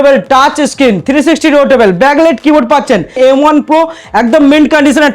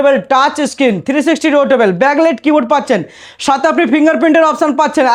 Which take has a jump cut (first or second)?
first